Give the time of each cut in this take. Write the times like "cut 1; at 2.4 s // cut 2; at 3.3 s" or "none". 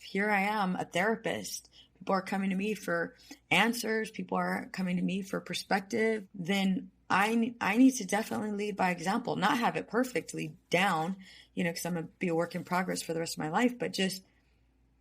cut 1; at 6.3 s